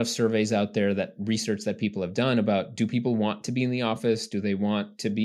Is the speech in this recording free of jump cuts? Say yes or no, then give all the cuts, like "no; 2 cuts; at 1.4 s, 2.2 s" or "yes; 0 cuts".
yes; 0 cuts